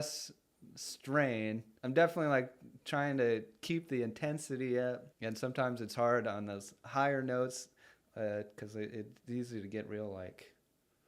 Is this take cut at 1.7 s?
yes; 1 cut; at 1.7 s

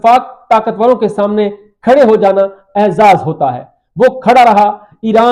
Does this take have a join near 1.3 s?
yes; 1 cut; at 1.3 s

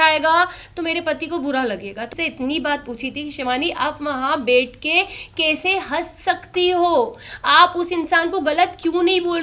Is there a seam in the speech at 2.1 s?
yes; 1 cut; at 2.1 s

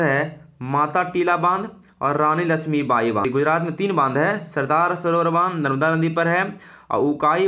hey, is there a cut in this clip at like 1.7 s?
no; 1 cut; at 3.2 s

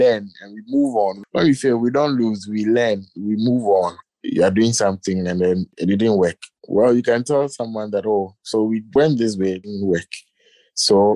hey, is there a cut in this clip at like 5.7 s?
yes; 2 cuts; at 4.1 s, 5.7 s

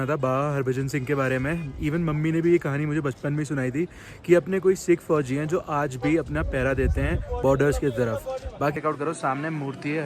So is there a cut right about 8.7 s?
yes; 1 cut; at 8.7 s

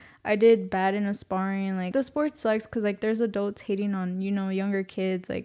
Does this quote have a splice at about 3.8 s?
no; 1 cut; at 1.9 s

